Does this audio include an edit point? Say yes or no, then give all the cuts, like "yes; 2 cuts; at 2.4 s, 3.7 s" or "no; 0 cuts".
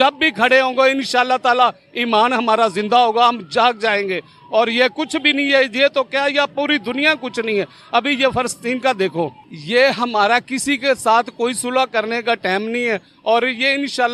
no; 0 cuts